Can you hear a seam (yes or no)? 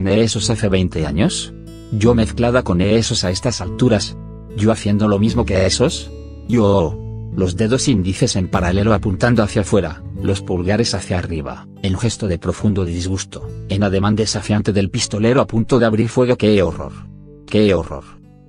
yes